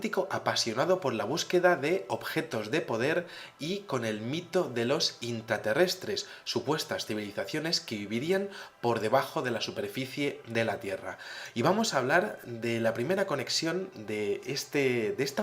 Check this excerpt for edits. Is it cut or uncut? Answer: cut